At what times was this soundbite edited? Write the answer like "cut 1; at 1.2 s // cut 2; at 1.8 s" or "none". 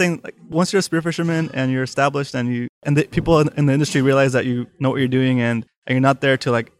cut 1; at 2.8 s // cut 2; at 5.7 s